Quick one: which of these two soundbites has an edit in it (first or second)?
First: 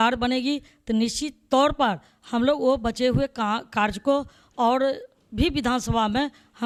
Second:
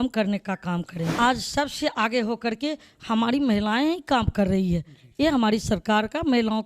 second